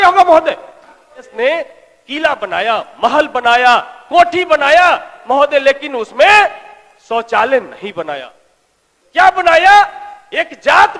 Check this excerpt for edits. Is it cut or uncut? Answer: cut